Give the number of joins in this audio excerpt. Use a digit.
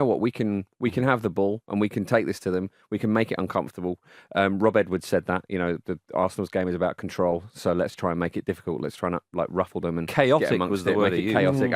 0